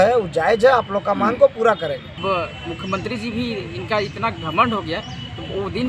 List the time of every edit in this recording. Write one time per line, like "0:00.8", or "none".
0:02.2